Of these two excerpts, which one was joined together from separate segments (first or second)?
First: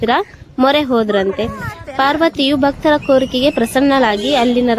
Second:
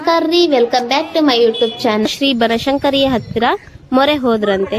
second